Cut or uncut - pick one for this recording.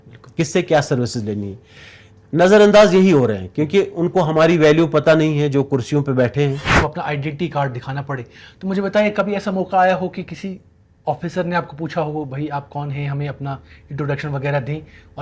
cut